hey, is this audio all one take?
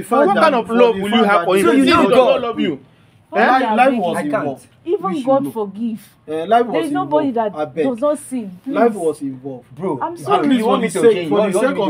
yes; 0 cuts

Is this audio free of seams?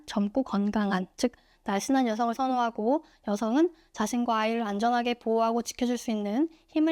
yes; 0 cuts

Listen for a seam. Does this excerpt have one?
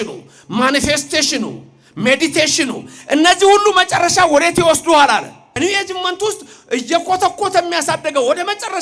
yes; 1 cut; at 5.6 s

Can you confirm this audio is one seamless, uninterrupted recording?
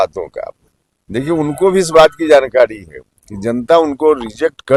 yes; 0 cuts

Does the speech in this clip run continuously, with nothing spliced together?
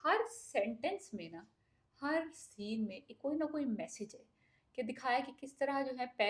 yes; 0 cuts

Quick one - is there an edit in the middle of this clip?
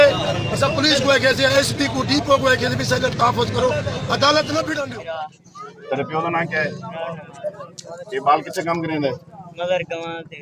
yes; 1 cut; at 4.9 s

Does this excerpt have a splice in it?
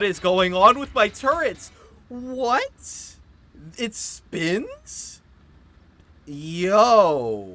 no; 0 cuts

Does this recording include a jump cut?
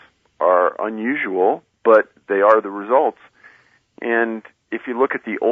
no; 0 cuts

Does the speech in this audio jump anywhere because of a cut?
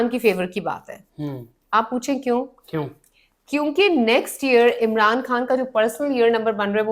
no; 0 cuts

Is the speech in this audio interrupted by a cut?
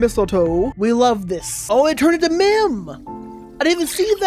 yes; 1 cut; at 1.5 s

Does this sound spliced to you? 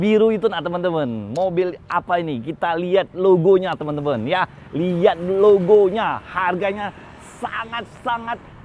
no; 0 cuts

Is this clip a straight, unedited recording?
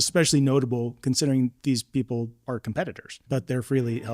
no; 2 cuts; at 1.6 s, 3.1 s

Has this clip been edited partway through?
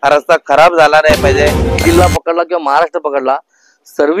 yes; 1 cut; at 1.8 s

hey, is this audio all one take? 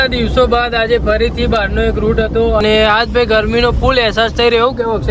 no; 1 cut; at 2.6 s

